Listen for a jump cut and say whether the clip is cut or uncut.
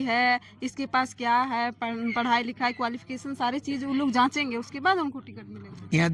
uncut